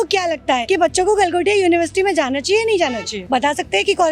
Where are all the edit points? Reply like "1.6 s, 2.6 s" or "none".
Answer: 3.1 s

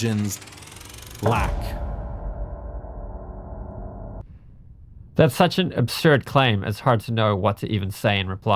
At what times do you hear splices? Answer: none

